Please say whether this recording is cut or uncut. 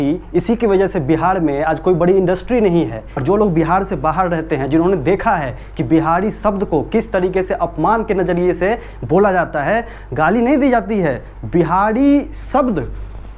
cut